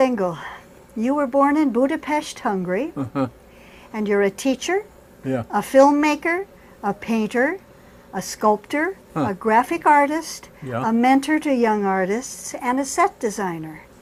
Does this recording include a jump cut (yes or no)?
no